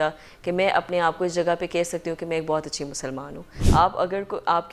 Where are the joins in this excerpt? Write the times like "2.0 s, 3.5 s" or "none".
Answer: 3.5 s